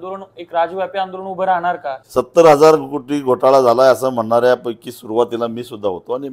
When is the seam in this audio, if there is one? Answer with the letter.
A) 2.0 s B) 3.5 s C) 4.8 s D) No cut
A